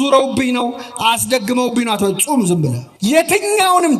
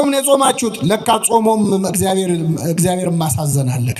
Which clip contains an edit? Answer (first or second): first